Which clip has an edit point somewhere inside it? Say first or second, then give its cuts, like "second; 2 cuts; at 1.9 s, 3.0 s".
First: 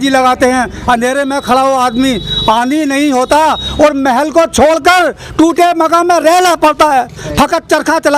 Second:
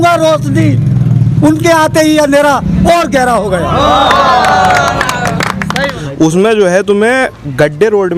second; 1 cut; at 5.7 s